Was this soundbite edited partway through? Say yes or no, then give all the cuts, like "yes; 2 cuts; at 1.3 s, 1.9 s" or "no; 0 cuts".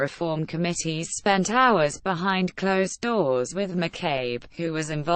yes; 1 cut; at 3.8 s